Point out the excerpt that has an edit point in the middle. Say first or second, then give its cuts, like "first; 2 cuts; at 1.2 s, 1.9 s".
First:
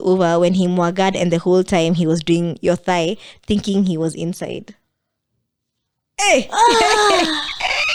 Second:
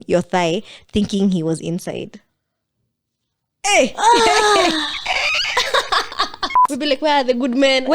second; 1 cut; at 6.7 s